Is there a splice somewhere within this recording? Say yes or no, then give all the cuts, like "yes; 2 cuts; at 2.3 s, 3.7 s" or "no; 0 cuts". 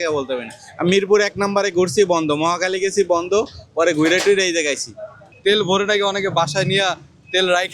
yes; 1 cut; at 5.3 s